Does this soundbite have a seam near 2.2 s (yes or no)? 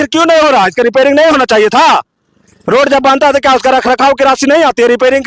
no